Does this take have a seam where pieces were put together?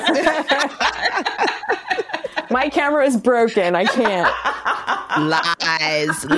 no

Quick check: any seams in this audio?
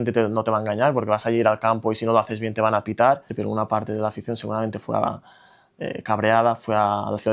yes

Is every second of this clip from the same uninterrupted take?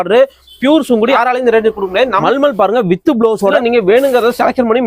no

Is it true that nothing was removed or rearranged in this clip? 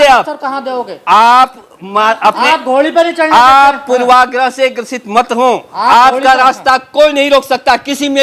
yes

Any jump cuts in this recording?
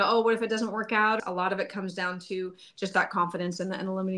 yes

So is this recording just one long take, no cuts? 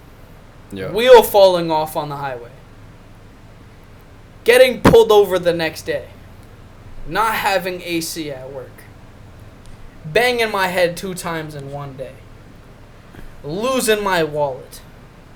yes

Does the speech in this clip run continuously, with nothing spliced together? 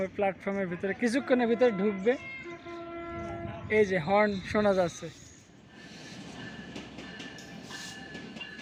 yes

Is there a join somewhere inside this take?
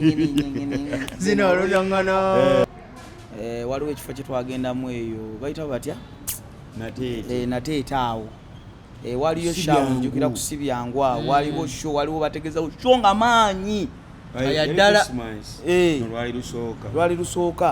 yes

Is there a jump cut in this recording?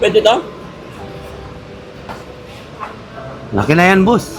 no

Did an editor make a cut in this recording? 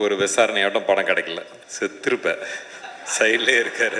yes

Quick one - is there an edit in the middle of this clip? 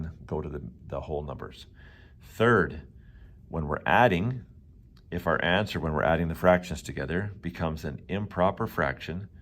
no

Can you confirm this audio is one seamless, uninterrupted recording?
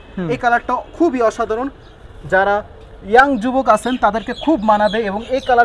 yes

